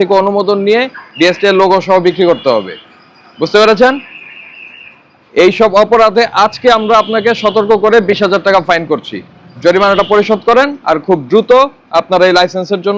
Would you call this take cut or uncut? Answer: uncut